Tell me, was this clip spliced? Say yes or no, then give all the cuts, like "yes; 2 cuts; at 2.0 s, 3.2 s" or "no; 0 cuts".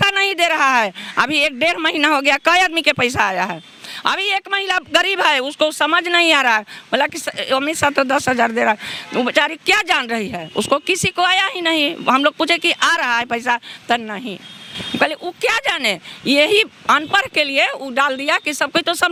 no; 0 cuts